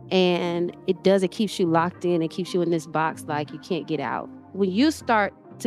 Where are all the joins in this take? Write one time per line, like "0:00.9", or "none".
0:04.3